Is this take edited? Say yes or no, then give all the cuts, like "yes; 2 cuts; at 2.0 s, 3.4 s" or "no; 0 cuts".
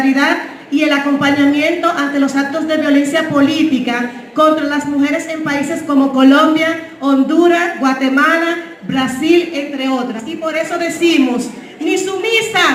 no; 0 cuts